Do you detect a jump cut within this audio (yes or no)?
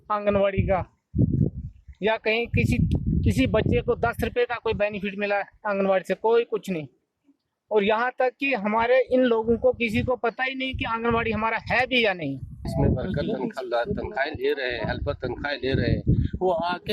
yes